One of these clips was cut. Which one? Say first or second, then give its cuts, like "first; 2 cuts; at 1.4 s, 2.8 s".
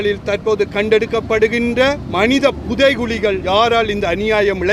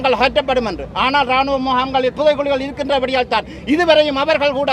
first; 2 cuts; at 2.1 s, 3.4 s